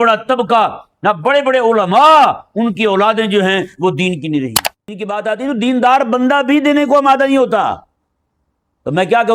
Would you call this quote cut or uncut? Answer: cut